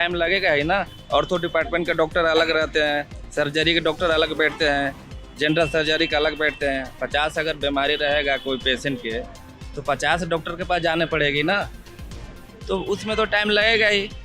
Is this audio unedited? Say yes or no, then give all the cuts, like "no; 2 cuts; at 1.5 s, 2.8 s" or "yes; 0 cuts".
yes; 0 cuts